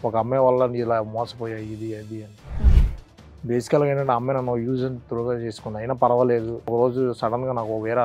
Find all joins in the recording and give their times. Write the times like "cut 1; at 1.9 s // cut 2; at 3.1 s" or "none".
cut 1; at 6.7 s